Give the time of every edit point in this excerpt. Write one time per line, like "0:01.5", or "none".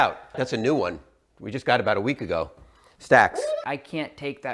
0:03.6

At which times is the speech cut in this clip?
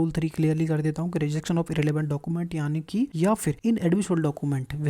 0:03.4

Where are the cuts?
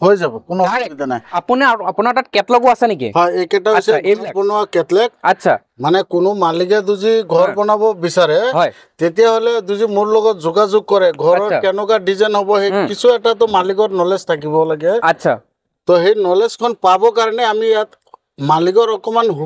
none

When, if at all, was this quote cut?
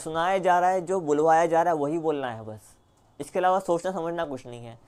none

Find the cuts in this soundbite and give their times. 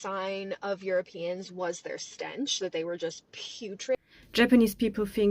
0:04.0

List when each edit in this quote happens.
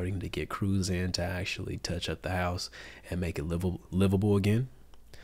none

